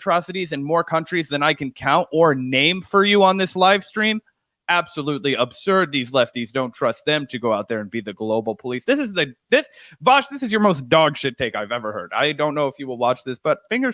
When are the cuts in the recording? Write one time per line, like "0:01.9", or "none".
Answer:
none